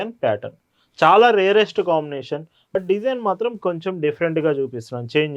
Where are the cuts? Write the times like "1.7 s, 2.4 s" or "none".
2.8 s